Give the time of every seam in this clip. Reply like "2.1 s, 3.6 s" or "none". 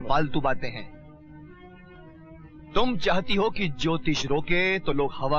none